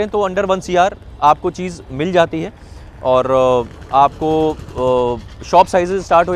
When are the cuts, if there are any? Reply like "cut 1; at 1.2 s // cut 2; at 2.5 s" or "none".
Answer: none